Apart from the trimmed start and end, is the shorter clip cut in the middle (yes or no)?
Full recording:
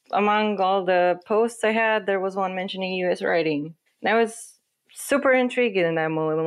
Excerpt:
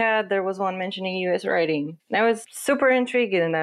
yes